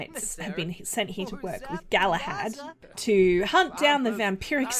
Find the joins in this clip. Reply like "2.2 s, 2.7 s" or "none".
2.7 s